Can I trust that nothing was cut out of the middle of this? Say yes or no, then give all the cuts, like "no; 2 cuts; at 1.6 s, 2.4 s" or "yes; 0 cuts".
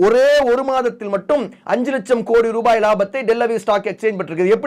yes; 0 cuts